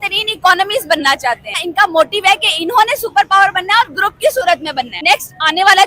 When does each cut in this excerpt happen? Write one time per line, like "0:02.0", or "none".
0:01.6
0:05.0

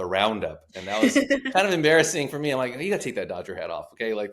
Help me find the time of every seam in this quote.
none

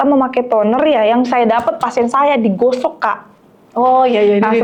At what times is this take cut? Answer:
none

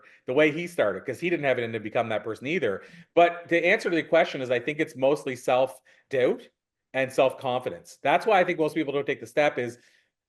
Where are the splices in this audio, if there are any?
none

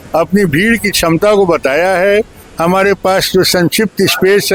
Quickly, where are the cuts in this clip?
none

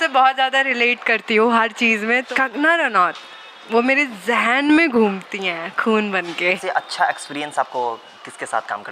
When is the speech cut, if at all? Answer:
0:02.2
0:06.6

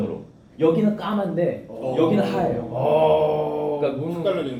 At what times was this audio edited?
none

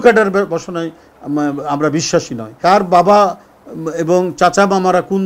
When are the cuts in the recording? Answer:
0:02.5

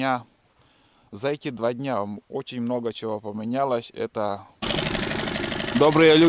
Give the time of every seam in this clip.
0:04.7

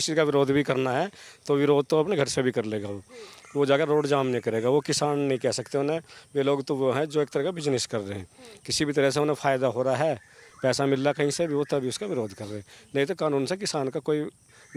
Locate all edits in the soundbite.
none

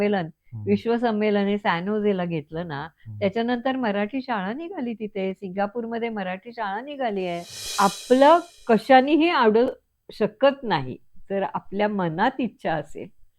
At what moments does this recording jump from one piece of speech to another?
0:07.7

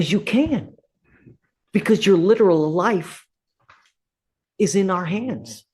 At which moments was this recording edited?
none

